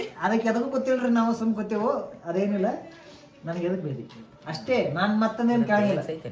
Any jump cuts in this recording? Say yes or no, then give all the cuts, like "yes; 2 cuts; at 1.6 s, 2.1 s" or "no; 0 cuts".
no; 0 cuts